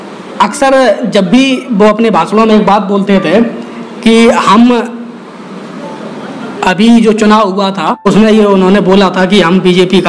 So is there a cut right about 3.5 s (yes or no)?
no